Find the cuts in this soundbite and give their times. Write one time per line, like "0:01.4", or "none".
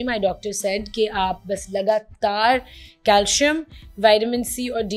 none